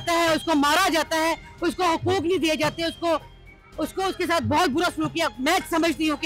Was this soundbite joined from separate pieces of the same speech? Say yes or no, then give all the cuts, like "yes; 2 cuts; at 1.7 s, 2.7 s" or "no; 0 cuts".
no; 0 cuts